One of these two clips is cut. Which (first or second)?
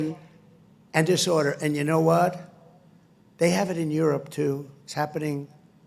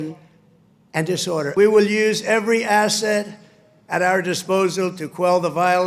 second